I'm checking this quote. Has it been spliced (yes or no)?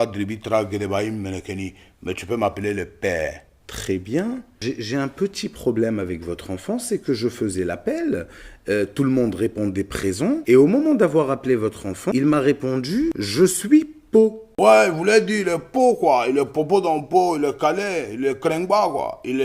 yes